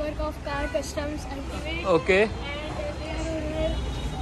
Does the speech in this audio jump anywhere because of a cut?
no; 0 cuts

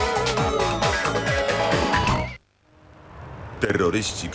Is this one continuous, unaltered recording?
no; 1 cut; at 2.1 s

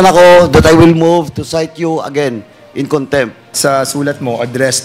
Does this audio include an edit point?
no; 0 cuts

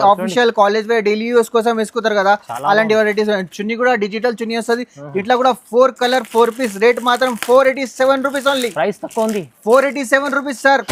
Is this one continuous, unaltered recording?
yes; 0 cuts

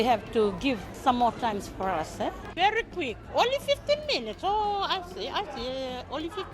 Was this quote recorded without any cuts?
no; 2 cuts; at 0.9 s, 2.4 s

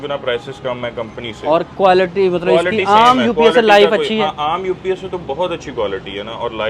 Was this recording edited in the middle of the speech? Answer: no; 0 cuts

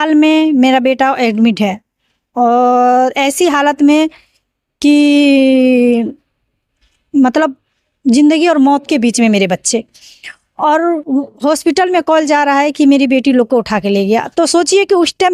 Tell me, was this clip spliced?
no; 0 cuts

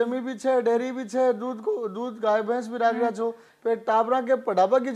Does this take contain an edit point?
no; 0 cuts

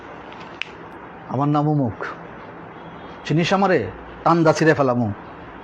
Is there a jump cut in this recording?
yes; 1 cut; at 0.9 s

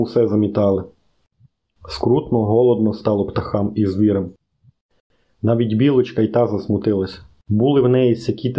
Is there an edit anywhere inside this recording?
no; 0 cuts

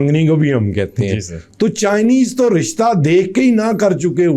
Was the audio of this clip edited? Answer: no; 0 cuts

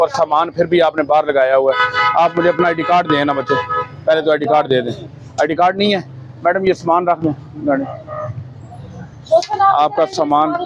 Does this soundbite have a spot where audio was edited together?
no; 0 cuts

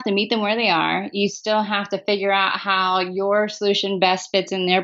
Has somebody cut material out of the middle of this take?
no; 0 cuts

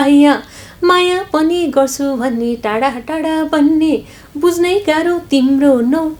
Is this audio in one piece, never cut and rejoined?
yes; 0 cuts

